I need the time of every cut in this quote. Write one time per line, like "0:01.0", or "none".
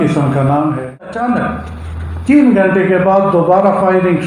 0:01.2